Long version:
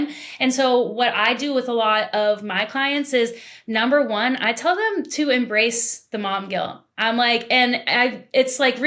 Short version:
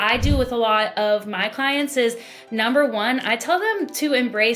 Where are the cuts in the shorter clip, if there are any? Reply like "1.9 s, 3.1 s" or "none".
none